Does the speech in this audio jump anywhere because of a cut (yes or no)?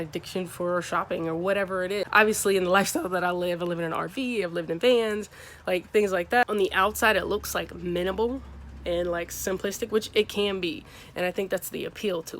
yes